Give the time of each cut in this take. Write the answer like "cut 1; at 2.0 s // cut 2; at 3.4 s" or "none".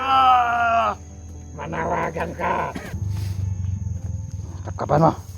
cut 1; at 2.9 s